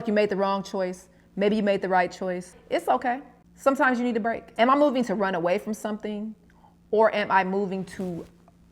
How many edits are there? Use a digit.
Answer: 2